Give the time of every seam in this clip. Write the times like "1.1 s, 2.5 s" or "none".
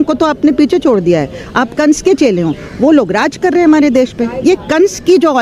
none